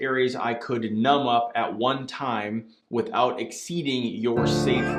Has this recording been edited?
no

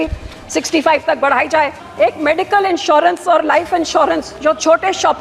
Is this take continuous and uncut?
no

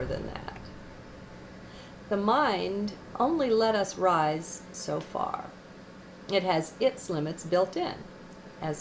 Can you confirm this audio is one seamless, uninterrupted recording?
yes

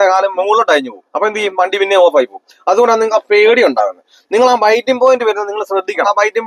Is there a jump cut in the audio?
no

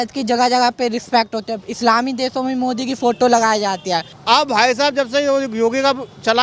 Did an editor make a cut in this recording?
yes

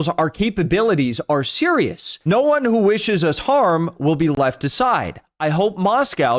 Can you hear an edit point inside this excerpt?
no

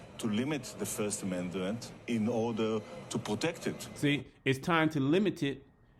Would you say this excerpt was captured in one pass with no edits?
yes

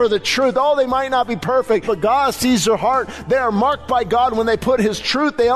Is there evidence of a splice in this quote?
yes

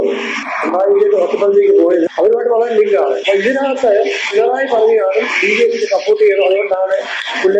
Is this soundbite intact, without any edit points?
yes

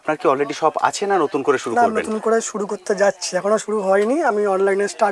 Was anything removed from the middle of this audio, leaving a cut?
no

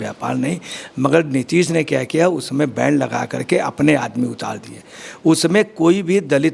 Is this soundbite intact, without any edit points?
yes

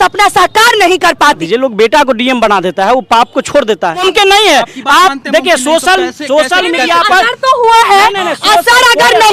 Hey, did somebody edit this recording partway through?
yes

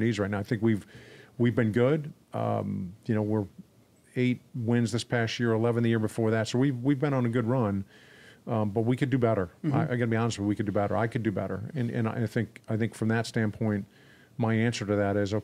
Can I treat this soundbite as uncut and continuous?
yes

